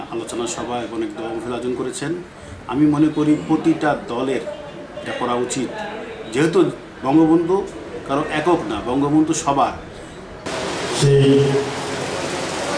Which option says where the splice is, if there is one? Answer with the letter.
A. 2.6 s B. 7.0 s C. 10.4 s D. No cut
C